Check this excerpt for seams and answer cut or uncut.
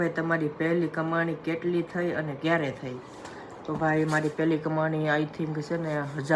uncut